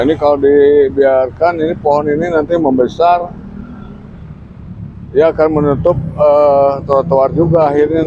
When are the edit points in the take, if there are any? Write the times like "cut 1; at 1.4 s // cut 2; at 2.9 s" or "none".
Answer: none